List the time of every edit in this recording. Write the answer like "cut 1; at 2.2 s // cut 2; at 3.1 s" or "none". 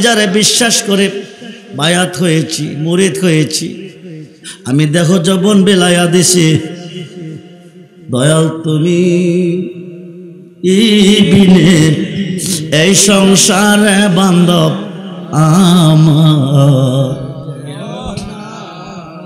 none